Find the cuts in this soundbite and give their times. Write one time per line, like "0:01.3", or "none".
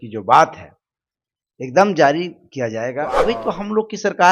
0:03.2